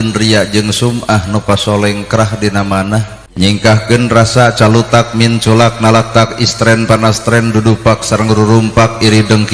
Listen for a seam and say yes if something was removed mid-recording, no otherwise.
yes